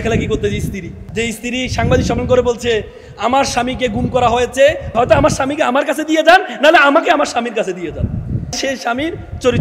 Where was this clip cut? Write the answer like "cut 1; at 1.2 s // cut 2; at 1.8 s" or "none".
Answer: cut 1; at 1.0 s // cut 2; at 4.9 s // cut 3; at 8.6 s